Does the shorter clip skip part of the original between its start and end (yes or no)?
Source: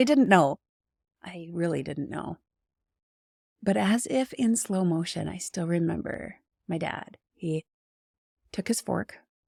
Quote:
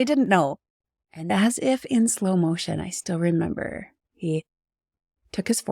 yes